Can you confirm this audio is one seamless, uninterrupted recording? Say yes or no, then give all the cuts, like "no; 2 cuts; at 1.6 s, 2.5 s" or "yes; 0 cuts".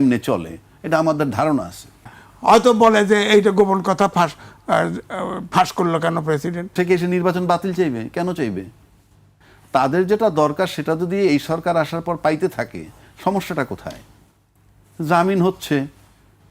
no; 2 cuts; at 2.2 s, 6.7 s